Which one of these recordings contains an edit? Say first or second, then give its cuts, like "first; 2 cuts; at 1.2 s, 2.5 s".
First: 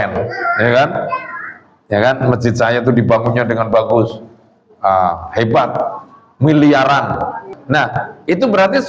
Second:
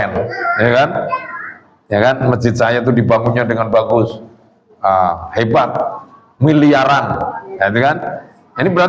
first; 1 cut; at 7.4 s